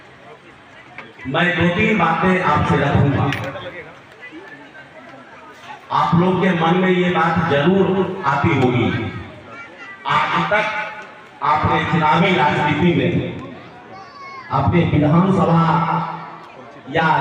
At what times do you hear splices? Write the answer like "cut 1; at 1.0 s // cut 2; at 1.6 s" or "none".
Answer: none